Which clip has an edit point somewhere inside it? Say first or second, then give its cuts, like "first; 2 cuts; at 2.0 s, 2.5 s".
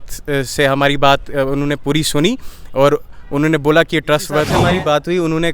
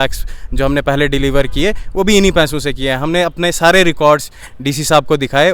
first; 1 cut; at 4.5 s